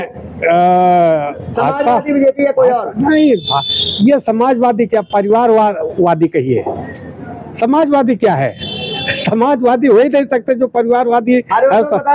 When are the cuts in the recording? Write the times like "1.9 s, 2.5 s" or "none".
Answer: none